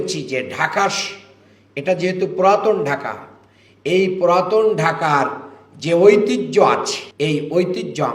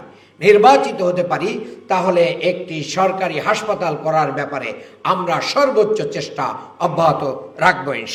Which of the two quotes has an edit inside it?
first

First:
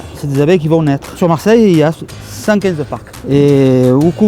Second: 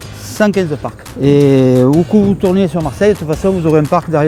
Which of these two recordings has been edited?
first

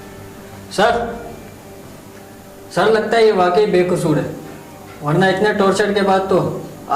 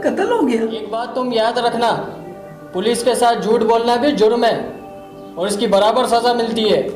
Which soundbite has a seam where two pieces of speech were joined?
second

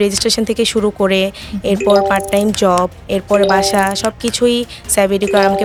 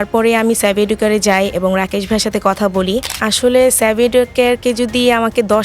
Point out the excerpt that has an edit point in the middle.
second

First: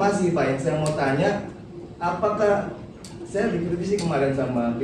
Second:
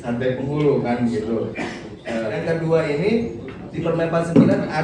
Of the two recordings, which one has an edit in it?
second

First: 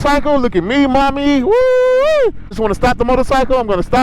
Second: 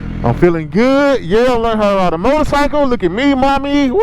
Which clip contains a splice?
first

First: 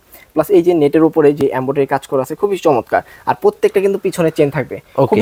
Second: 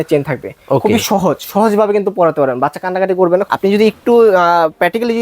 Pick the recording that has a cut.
second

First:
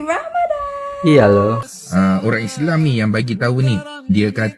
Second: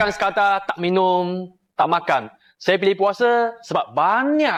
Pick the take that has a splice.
first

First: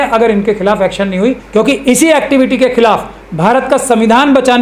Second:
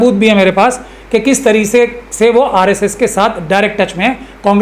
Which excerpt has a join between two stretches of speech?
first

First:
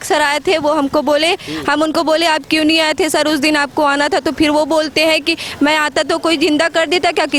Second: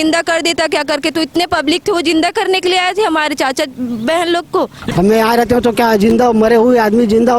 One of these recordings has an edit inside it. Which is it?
second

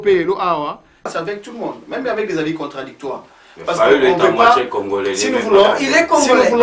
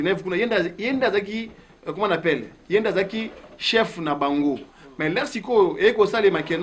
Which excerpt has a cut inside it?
first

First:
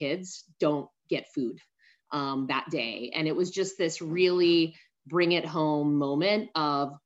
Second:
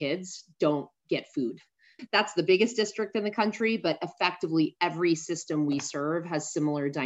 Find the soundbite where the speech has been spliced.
second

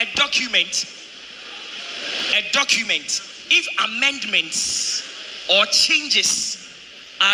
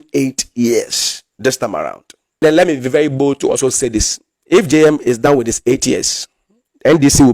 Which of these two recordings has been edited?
second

